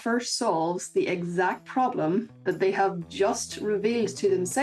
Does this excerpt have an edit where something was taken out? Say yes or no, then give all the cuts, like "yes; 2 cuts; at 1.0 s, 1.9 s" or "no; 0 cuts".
no; 0 cuts